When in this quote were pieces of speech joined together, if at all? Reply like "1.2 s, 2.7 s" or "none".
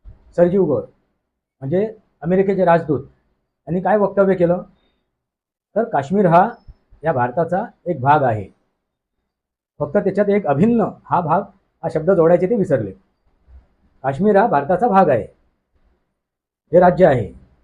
none

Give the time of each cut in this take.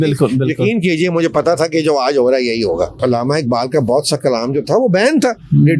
3.0 s

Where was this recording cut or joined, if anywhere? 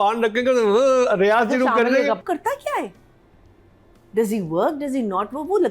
2.2 s

